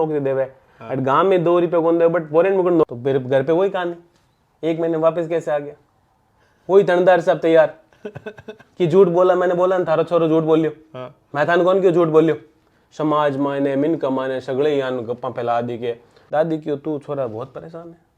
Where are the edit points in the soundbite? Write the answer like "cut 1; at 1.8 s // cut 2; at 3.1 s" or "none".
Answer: cut 1; at 2.8 s // cut 2; at 16.1 s